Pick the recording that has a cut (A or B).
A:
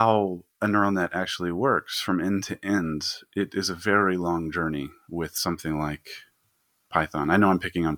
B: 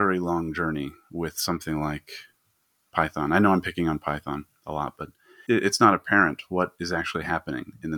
B